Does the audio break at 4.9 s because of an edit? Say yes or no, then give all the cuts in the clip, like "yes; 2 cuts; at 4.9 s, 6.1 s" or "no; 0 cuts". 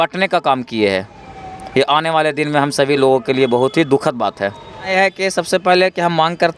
yes; 1 cut; at 4.9 s